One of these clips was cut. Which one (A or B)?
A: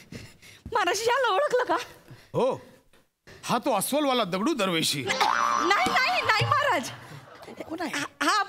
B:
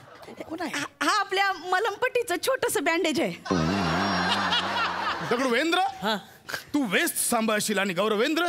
B